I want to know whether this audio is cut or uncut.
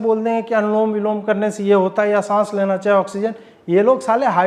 uncut